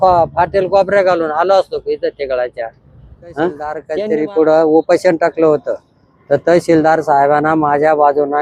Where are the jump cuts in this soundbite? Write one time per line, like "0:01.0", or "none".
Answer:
0:03.9

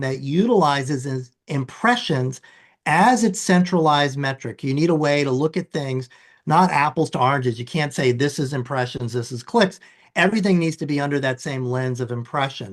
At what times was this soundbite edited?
none

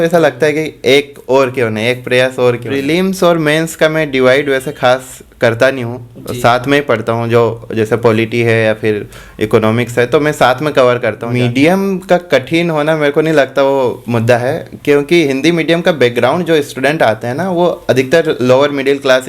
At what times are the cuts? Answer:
0:02.8
0:11.2

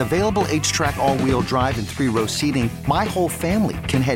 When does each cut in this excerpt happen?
none

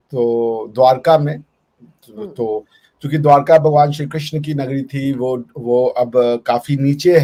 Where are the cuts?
none

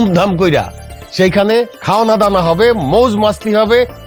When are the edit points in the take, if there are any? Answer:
0:01.8

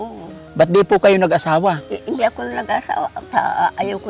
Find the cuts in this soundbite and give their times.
0:01.9

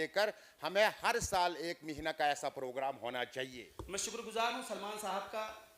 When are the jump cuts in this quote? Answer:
0:03.6

